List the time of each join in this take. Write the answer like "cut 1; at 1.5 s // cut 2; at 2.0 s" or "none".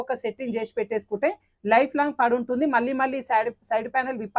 none